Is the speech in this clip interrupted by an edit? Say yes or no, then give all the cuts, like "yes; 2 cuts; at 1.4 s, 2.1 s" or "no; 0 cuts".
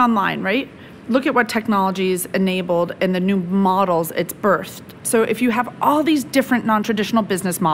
yes; 2 cuts; at 0.9 s, 4.9 s